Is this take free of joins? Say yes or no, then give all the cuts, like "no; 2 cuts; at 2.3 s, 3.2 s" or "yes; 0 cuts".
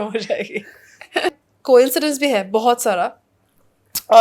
no; 1 cut; at 1.4 s